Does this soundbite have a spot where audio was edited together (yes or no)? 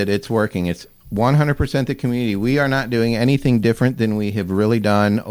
no